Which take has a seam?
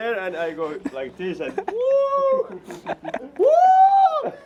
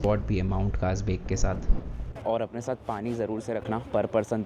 second; 1 cut; at 2.1 s

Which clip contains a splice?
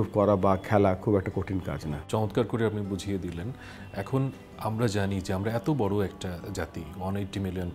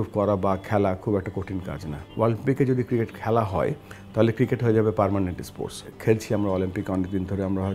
second; 2 cuts; at 1.9 s, 5.9 s

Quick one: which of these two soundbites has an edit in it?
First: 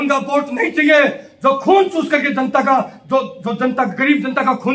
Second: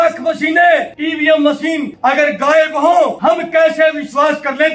second; 3 cuts; at 1.0 s, 1.9 s, 3.2 s

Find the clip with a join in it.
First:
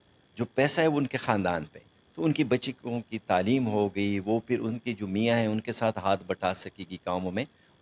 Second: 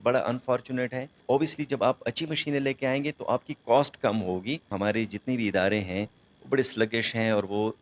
second; 2 cuts; at 1.2 s, 4.7 s

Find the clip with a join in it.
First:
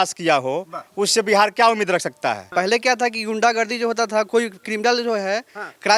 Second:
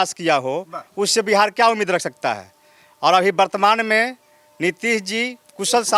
first; 1 cut; at 2.4 s

